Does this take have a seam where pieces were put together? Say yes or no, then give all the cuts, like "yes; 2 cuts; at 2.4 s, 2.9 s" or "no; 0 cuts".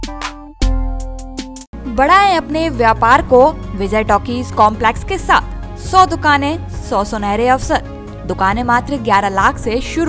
no; 0 cuts